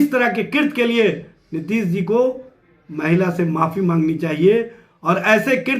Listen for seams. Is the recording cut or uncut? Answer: uncut